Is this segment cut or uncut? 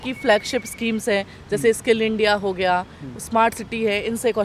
uncut